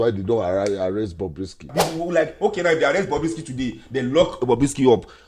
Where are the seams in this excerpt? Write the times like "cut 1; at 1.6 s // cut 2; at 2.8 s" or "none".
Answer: cut 1; at 1.8 s